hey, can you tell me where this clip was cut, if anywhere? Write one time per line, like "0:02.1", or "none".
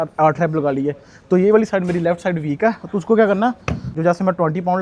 0:03.9